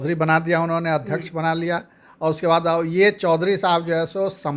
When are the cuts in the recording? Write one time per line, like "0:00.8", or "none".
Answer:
none